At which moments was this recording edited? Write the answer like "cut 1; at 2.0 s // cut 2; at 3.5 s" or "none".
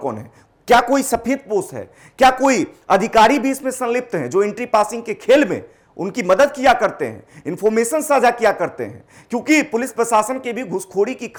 none